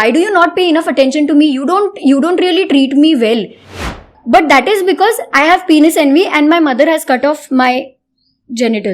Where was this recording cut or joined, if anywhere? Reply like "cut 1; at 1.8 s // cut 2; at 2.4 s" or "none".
cut 1; at 3.9 s